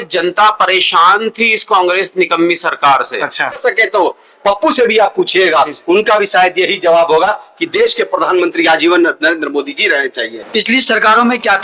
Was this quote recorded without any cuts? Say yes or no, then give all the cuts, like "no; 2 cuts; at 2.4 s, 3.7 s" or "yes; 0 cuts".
no; 2 cuts; at 3.6 s, 10.4 s